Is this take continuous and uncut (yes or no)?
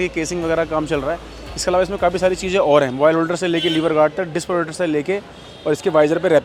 yes